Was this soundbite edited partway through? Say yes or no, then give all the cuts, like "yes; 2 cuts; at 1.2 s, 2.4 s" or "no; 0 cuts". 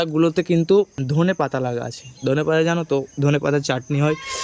yes; 1 cut; at 1.0 s